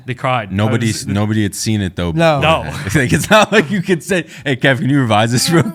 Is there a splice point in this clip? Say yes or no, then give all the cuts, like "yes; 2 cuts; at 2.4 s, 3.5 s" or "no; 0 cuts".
no; 0 cuts